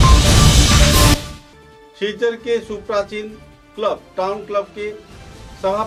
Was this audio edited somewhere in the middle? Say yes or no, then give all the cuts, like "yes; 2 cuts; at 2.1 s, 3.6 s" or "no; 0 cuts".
no; 0 cuts